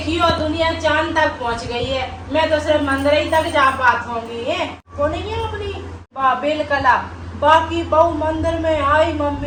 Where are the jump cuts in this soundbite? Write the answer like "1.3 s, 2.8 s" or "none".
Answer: none